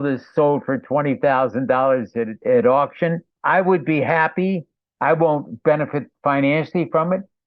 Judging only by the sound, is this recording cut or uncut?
cut